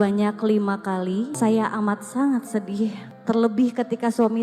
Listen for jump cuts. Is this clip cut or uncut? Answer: cut